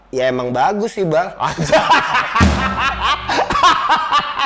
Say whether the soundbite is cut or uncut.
uncut